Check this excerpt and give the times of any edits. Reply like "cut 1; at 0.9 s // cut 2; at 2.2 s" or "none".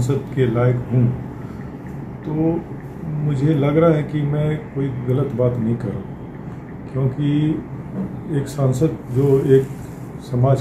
none